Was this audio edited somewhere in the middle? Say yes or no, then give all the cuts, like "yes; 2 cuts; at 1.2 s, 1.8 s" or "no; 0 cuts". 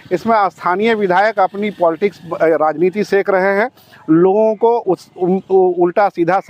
no; 0 cuts